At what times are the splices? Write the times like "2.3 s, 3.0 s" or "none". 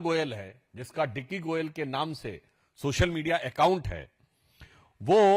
none